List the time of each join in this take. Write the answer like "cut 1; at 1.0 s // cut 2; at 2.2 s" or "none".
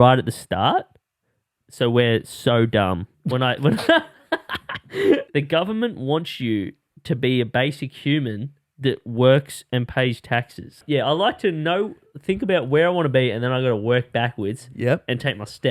cut 1; at 3.1 s // cut 2; at 5.2 s // cut 3; at 10.8 s

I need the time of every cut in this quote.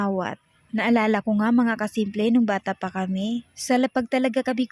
cut 1; at 3.5 s

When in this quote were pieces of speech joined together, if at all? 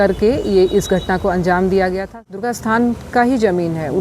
cut 1; at 2.2 s

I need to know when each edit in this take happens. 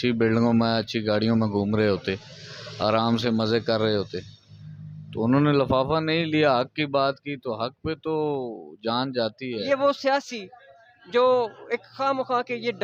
cut 1; at 9.7 s

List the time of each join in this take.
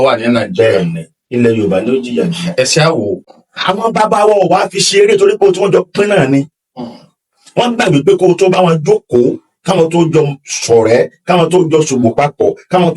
cut 1; at 3.4 s

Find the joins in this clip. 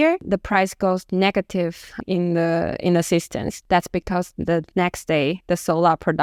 none

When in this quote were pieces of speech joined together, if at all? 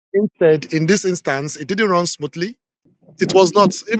cut 1; at 2.7 s

